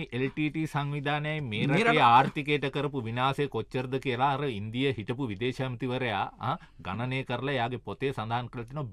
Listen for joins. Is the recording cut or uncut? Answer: uncut